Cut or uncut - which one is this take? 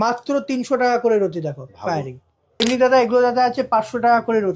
cut